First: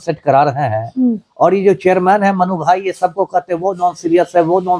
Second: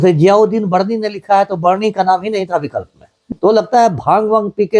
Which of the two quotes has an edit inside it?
second; 1 cut; at 3.3 s

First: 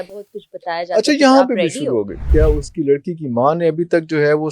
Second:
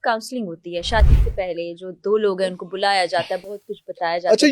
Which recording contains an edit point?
first; 1 cut; at 2.2 s

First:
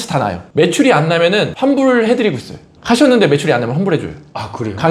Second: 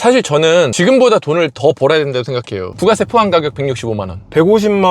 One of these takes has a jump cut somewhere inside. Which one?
second; 1 cut; at 2.7 s

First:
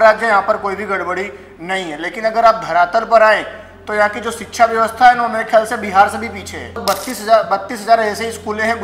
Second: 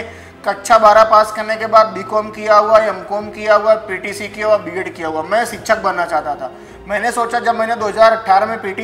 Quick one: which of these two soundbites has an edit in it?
first; 1 cut; at 6.8 s

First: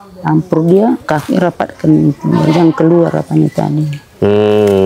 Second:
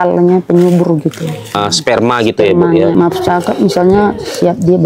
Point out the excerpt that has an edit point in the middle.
second; 2 cuts; at 1.5 s, 2.9 s

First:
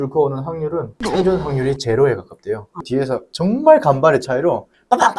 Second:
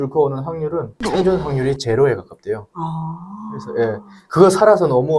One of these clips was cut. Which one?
first; 1 cut; at 2.8 s

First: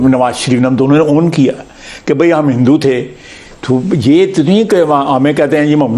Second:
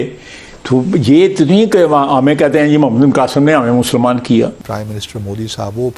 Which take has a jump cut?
second; 1 cut; at 4.5 s

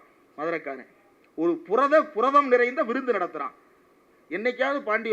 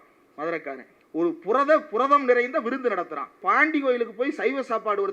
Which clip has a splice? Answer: second; 2 cuts; at 0.9 s, 3.4 s

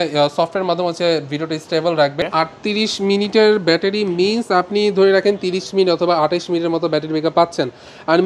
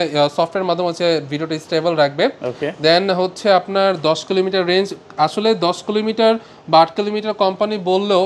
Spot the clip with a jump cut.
first; 1 cut; at 2.2 s

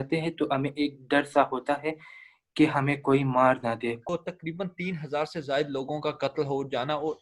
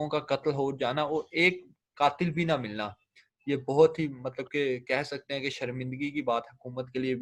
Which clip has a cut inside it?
first; 1 cut; at 4.0 s

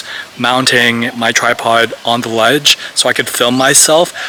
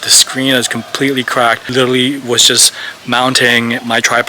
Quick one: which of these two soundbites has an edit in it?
second; 1 cut; at 1.6 s

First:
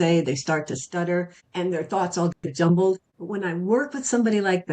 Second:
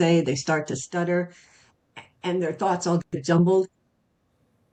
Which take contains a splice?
first; 2 cuts; at 1.4 s, 3.1 s

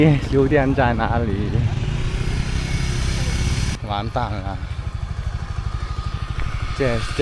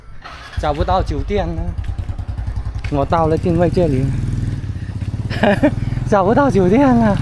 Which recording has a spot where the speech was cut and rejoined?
first; 1 cut; at 3.7 s

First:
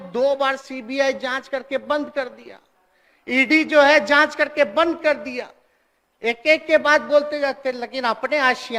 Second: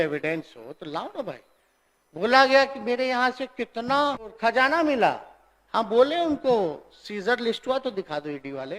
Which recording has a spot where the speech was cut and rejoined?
second; 1 cut; at 4.3 s

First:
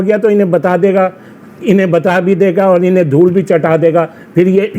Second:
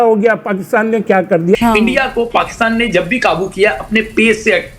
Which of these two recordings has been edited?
second; 1 cut; at 1.6 s

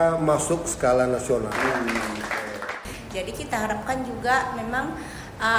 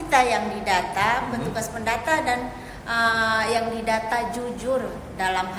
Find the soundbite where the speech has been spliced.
first; 1 cut; at 2.5 s

